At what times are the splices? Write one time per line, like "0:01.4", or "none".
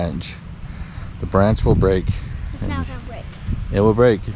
none